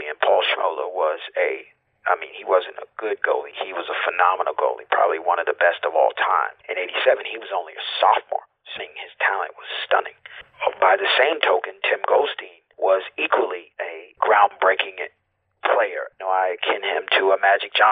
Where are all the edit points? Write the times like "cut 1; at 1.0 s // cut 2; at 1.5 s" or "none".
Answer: cut 1; at 6.6 s // cut 2; at 8.8 s // cut 3; at 10.5 s // cut 4; at 14.0 s // cut 5; at 16.1 s